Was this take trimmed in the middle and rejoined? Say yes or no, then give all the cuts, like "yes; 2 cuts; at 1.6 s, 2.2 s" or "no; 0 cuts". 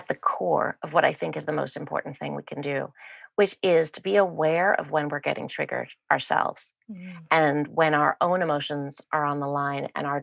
no; 0 cuts